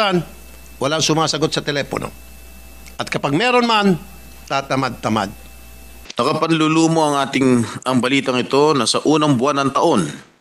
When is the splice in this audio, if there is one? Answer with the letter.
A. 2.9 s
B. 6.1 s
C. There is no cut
B